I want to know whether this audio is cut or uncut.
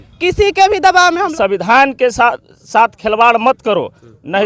cut